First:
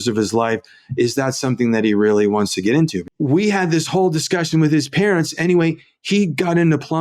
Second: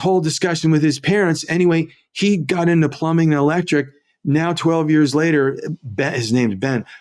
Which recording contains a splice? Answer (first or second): first